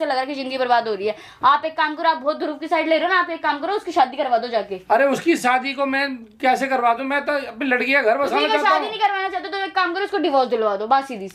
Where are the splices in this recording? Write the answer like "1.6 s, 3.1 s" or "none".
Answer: none